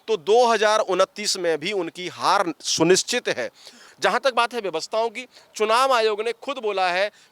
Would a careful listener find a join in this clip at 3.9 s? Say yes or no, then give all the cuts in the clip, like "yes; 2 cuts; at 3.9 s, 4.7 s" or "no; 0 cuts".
yes; 1 cut; at 3.9 s